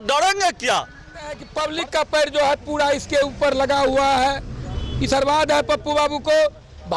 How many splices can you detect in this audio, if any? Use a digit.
1